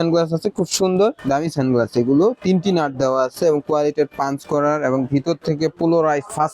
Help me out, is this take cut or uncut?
cut